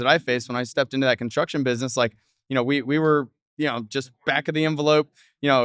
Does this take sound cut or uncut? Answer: uncut